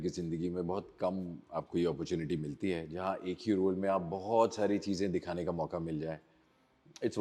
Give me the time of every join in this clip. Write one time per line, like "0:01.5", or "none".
none